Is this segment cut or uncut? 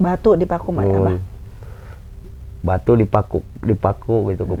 uncut